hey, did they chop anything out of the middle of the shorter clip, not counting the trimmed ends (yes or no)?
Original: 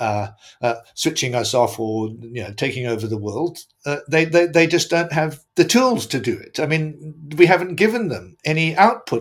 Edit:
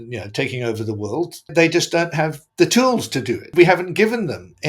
yes